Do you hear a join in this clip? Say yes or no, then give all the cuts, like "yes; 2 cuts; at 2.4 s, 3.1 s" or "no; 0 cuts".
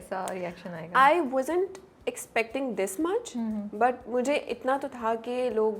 no; 0 cuts